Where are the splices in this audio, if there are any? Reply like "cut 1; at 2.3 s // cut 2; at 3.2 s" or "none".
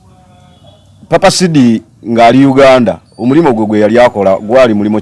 none

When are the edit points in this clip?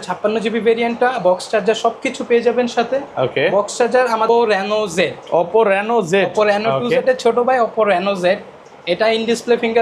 cut 1; at 4.3 s

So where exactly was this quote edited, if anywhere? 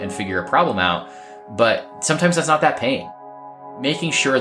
cut 1; at 1.9 s // cut 2; at 3.6 s

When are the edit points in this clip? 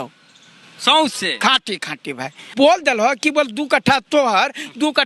cut 1; at 2.5 s

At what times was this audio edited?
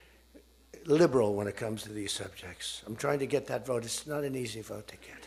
none

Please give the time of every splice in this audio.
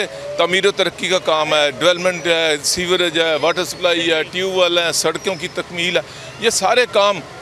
none

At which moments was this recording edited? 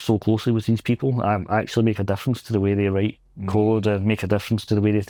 none

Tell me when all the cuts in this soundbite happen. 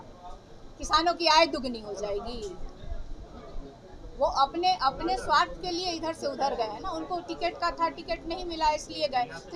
none

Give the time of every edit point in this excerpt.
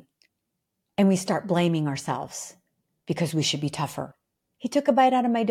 cut 1; at 4.2 s

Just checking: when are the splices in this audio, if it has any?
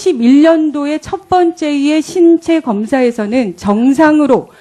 cut 1; at 2.2 s

